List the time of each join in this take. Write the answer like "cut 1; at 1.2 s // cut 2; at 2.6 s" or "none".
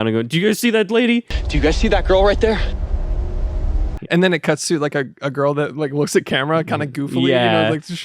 cut 1; at 4.0 s

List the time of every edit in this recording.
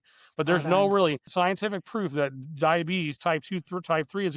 cut 1; at 1.2 s

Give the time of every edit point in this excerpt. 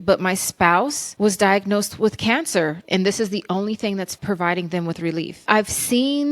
cut 1; at 1.0 s // cut 2; at 2.8 s // cut 3; at 4.2 s // cut 4; at 5.4 s

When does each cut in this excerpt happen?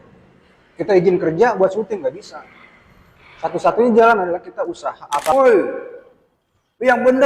cut 1; at 5.3 s

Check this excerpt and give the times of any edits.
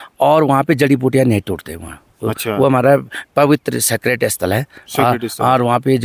none

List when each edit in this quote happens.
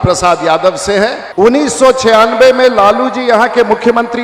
cut 1; at 1.2 s

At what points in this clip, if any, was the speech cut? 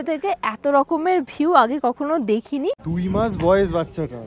cut 1; at 2.9 s

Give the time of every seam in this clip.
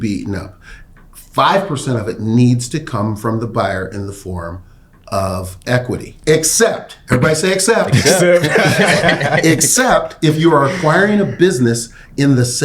cut 1; at 6.1 s

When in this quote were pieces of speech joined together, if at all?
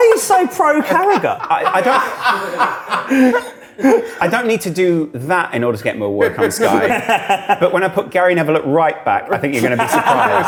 none

